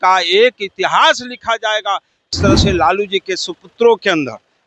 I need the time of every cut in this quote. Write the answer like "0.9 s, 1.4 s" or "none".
2.3 s